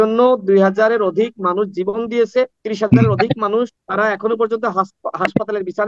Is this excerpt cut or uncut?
cut